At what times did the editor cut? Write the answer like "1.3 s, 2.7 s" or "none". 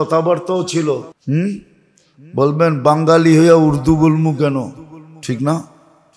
1.1 s